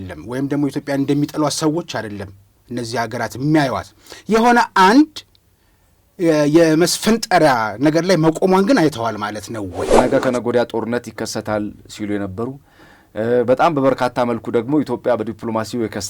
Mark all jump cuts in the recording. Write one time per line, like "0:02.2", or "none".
0:09.9